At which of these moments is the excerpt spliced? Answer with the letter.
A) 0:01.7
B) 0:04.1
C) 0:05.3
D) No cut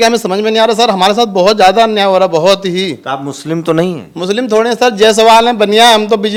D